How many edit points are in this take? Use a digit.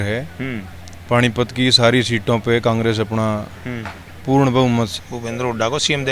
1